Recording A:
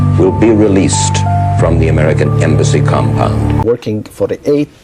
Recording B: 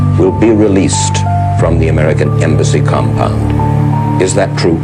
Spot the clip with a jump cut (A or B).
A